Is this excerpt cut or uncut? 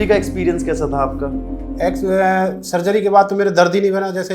uncut